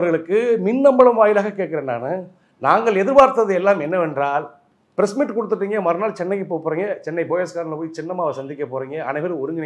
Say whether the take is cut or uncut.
uncut